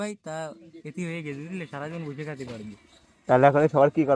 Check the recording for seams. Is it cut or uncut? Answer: uncut